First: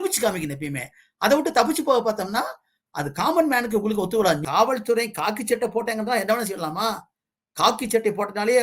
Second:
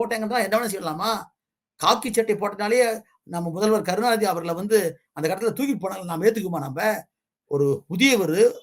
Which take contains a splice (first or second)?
first